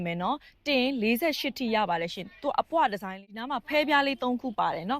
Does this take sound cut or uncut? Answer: cut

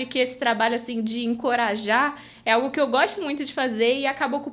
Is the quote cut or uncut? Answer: uncut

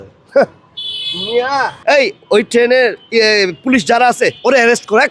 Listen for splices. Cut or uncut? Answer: cut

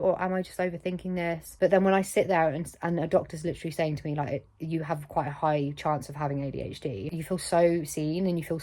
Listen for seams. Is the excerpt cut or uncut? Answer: cut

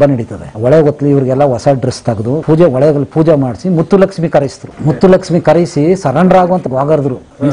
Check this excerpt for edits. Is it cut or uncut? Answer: cut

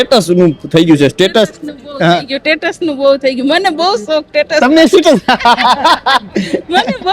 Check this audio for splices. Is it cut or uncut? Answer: uncut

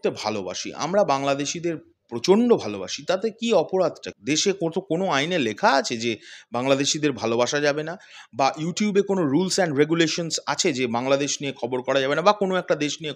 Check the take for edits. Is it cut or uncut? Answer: uncut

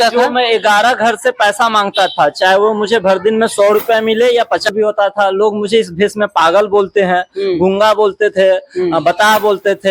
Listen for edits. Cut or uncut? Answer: cut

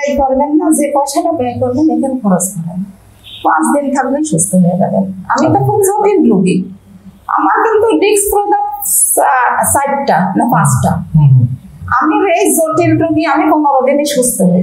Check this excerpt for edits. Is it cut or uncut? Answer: uncut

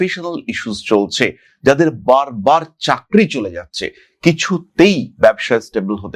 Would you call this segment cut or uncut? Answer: uncut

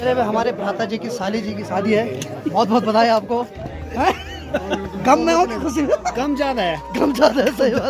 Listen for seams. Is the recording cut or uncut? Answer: cut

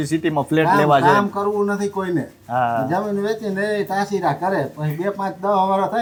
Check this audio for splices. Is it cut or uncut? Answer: uncut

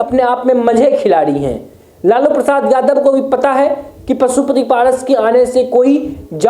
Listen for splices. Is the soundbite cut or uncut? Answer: uncut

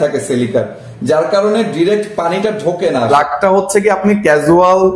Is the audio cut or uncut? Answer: cut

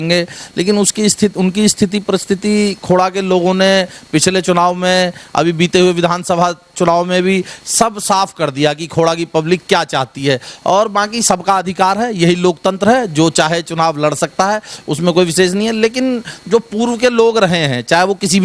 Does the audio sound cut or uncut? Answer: uncut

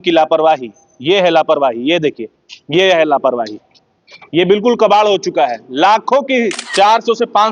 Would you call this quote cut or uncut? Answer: cut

